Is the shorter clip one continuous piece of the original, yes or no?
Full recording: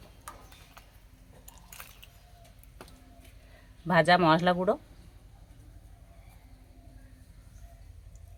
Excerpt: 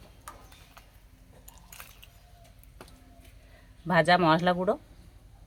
yes